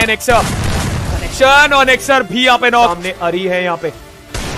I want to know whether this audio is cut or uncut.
cut